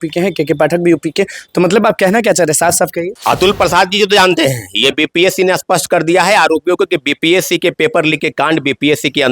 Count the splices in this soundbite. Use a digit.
1